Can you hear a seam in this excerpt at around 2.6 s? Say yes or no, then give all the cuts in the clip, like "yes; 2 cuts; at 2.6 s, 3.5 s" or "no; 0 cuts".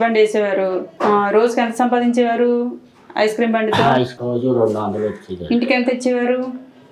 no; 2 cuts; at 0.9 s, 4.2 s